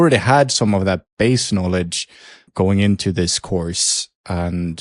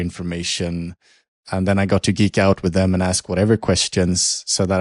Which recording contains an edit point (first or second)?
first